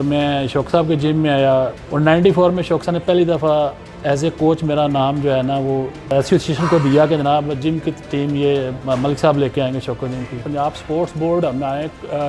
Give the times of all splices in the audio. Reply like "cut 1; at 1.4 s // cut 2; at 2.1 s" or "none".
cut 1; at 1.8 s // cut 2; at 10.4 s